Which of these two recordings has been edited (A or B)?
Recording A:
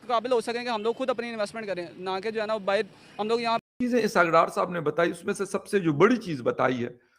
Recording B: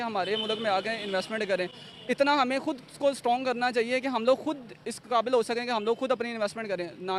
A